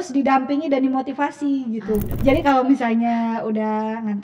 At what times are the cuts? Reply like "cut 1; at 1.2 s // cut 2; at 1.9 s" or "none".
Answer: cut 1; at 2.1 s